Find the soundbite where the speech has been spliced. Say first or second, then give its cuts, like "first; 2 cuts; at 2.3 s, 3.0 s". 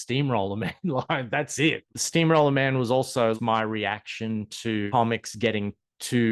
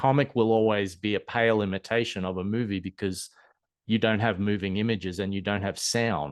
first; 3 cuts; at 1.9 s, 3.4 s, 4.9 s